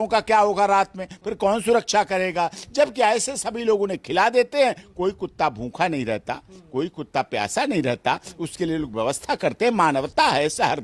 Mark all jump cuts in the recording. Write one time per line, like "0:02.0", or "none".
none